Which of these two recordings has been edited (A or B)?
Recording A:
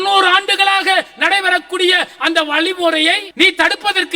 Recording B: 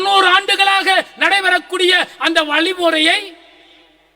A